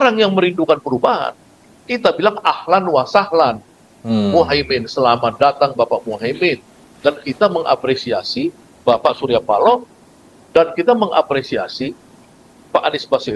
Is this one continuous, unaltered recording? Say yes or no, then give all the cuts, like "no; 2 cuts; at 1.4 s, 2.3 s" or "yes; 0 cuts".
yes; 0 cuts